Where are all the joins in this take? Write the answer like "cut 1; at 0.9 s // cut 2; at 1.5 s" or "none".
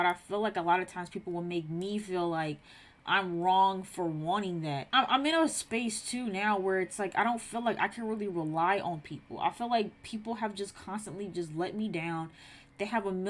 cut 1; at 4.8 s